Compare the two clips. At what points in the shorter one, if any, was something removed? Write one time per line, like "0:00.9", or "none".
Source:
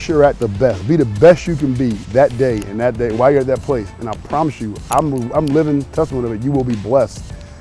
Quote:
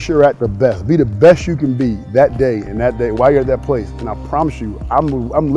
none